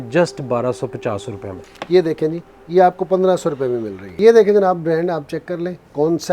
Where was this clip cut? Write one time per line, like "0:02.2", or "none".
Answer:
0:01.7
0:04.1

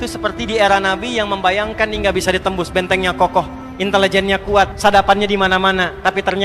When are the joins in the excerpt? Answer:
0:03.6
0:04.7

